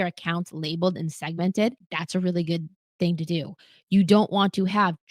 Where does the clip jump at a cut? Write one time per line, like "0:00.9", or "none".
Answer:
0:01.9